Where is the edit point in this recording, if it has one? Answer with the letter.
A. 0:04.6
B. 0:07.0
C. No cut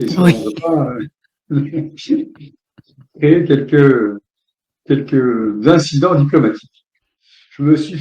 B